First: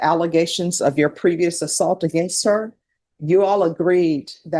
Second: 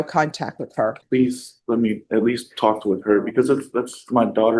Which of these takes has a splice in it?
second; 1 cut; at 1.0 s

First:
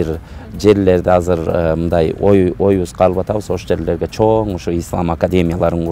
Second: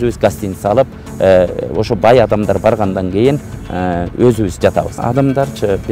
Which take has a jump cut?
second; 1 cut; at 5.0 s

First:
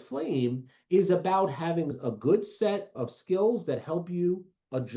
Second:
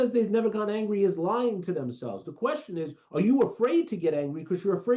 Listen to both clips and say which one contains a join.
first; 1 cut; at 2.9 s

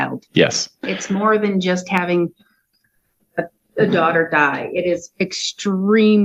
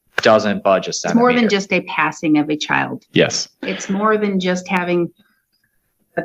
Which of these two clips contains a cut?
second; 1 cut; at 1.1 s

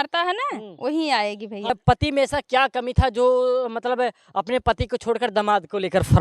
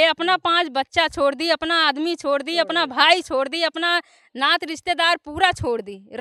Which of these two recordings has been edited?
first; 1 cut; at 1.7 s

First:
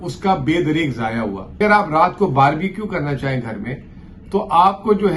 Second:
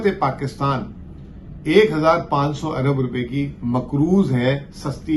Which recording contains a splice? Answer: first; 1 cut; at 1.6 s

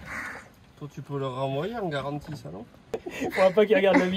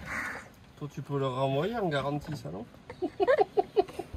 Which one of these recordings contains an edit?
first; 1 cut; at 3.1 s

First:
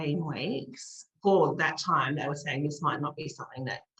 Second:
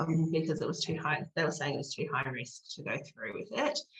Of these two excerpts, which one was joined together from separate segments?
first; 1 cut; at 1.1 s

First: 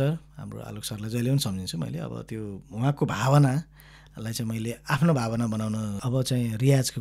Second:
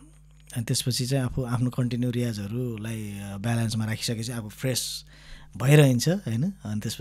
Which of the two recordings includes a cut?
first; 1 cut; at 6.0 s

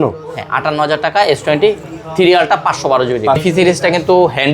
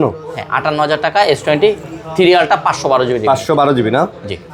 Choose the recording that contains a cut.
first; 1 cut; at 3.4 s

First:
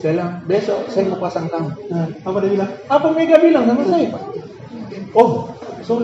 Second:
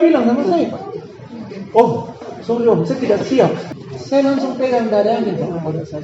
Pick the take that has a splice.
second; 1 cut; at 3.7 s

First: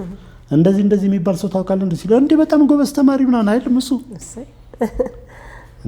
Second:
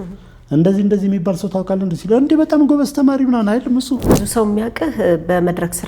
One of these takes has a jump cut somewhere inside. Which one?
second; 1 cut; at 4.2 s

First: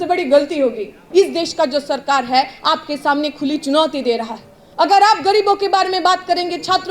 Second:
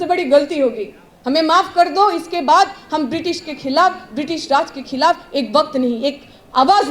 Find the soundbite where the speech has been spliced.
first; 1 cut; at 0.9 s

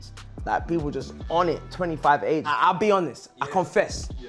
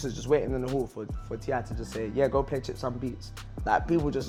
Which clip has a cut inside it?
first; 1 cut; at 2.5 s

